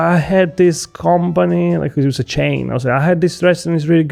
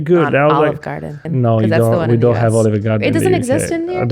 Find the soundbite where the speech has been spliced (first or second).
second